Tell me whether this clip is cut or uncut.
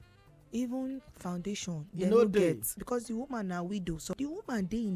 cut